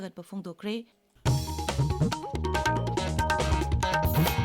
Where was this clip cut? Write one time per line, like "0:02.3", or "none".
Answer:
0:01.1